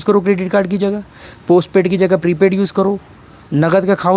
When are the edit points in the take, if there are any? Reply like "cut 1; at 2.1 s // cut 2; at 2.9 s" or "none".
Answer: none